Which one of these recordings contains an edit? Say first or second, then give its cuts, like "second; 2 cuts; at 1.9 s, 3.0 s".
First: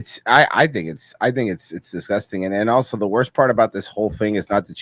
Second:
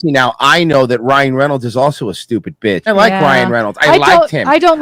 second; 1 cut; at 2.9 s